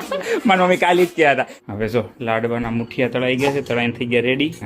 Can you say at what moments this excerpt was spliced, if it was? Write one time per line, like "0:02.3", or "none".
0:01.6